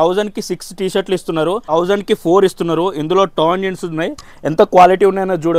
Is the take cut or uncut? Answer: cut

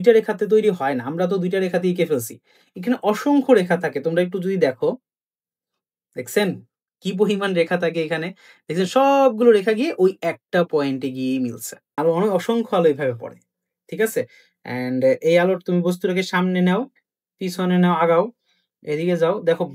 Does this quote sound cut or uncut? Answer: cut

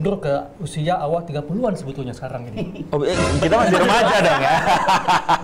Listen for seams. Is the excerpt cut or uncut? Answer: uncut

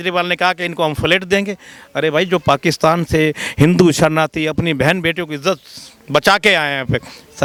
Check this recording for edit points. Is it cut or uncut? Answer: uncut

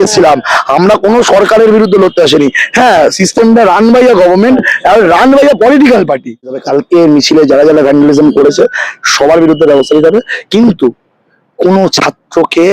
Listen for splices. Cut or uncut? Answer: cut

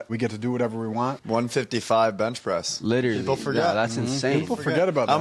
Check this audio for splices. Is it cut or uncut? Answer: cut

